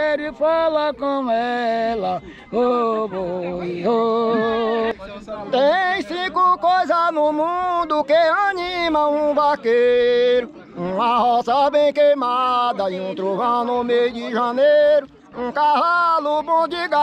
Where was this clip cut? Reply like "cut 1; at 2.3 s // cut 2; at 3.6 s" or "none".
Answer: cut 1; at 4.9 s

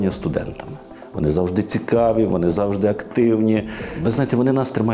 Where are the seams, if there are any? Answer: cut 1; at 1.0 s // cut 2; at 3.9 s

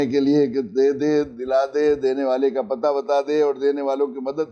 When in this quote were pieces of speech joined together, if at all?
none

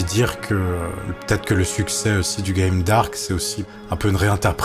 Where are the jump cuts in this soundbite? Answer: cut 1; at 1.1 s // cut 2; at 3.6 s

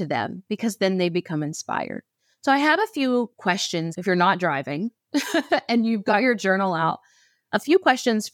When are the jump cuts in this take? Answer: none

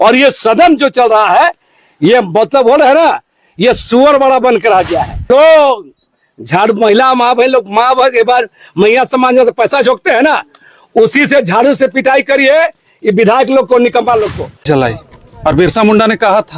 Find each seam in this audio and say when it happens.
cut 1; at 5.3 s // cut 2; at 14.7 s

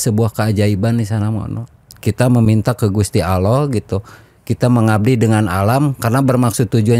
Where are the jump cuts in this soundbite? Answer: none

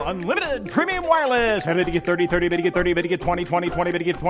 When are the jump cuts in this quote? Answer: none

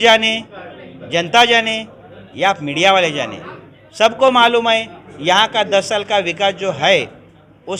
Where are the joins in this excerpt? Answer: none

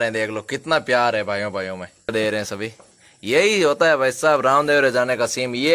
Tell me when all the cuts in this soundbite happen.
cut 1; at 2.1 s

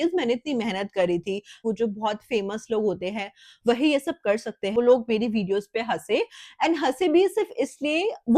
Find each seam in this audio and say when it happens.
cut 1; at 1.6 s // cut 2; at 4.8 s

